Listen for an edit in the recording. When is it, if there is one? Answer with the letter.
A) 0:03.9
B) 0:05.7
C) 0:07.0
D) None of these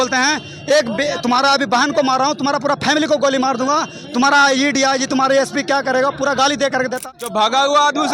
C